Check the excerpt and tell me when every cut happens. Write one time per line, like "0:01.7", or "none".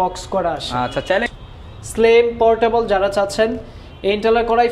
0:01.3